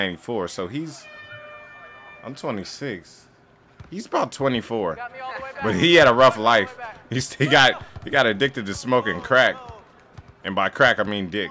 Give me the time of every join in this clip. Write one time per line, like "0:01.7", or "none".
none